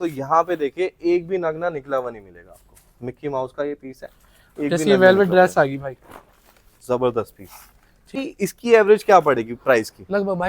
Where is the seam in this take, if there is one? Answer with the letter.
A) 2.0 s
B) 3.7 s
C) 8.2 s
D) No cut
C